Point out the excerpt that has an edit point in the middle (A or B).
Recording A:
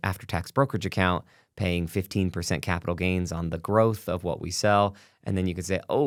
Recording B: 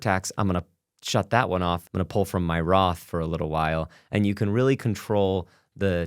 B